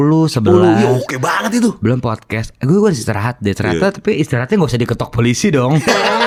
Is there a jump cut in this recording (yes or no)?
no